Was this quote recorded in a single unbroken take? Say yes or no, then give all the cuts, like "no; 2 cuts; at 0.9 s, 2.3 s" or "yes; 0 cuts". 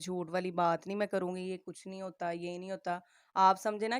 yes; 0 cuts